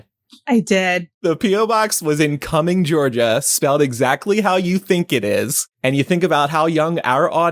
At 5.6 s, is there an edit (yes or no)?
yes